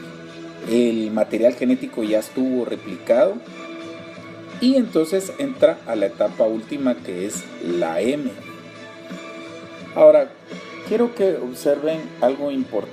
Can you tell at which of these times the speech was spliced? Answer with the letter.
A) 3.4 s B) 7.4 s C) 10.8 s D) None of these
B